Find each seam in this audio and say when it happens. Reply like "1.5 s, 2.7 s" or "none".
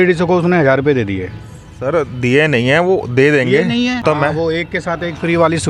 4.0 s